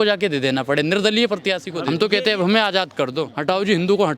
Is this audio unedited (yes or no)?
no